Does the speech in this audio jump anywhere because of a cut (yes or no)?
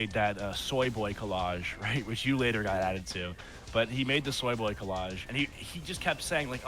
yes